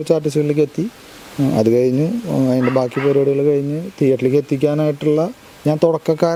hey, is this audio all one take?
yes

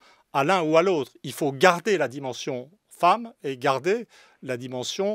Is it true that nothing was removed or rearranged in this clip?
yes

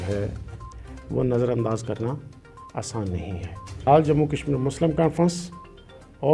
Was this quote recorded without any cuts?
no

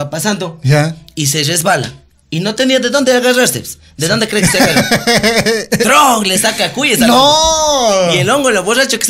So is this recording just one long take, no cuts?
yes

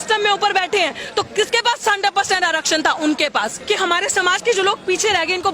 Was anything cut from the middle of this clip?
yes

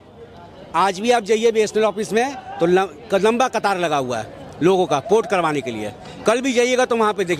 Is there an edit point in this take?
no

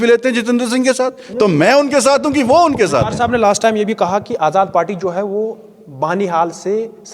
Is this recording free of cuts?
yes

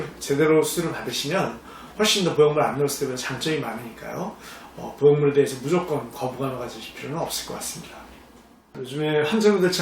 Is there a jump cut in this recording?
yes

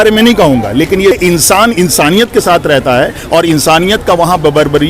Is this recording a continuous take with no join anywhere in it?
no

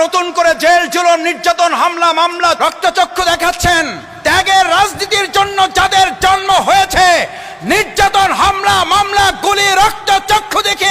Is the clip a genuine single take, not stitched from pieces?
no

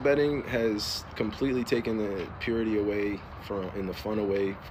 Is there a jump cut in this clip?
no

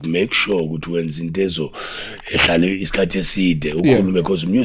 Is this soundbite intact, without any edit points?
yes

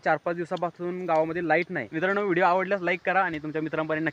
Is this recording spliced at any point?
yes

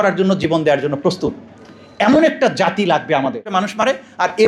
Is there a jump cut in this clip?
yes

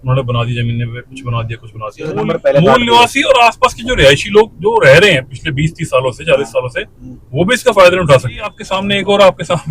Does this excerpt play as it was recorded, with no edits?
no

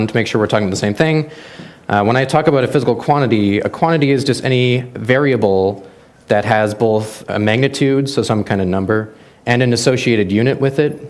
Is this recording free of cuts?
no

